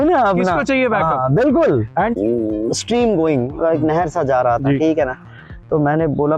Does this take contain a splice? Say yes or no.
yes